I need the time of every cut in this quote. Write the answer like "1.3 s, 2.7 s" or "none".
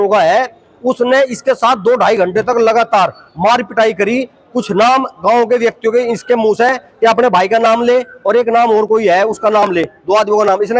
none